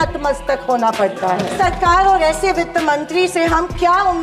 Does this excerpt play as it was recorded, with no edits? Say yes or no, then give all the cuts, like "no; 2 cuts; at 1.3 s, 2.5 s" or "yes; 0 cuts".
no; 1 cut; at 1.5 s